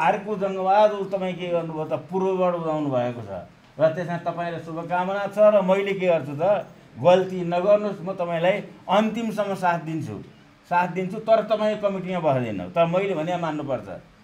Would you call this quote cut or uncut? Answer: uncut